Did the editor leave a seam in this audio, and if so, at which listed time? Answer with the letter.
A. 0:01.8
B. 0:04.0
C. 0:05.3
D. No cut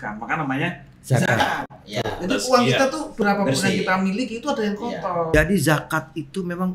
C